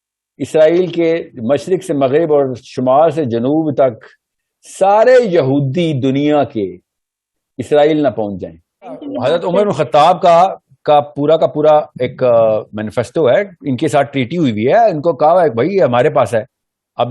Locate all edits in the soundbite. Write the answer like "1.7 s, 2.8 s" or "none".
9.1 s